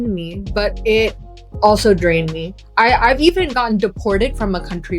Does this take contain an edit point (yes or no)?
yes